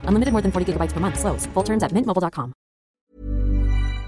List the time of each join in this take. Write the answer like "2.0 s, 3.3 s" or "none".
3.0 s